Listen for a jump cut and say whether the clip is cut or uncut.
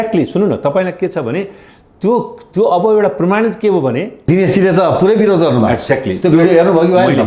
cut